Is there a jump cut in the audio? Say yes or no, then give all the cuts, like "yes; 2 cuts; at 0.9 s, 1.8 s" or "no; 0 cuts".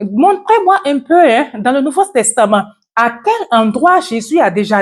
no; 0 cuts